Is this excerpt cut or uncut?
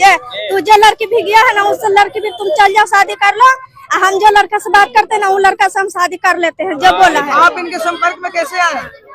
uncut